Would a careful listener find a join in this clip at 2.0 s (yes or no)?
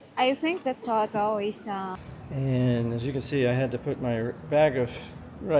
yes